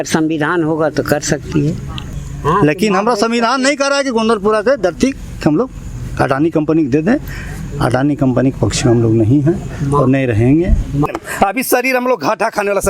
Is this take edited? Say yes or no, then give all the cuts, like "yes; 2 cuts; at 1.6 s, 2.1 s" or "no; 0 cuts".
yes; 2 cuts; at 2.2 s, 11.1 s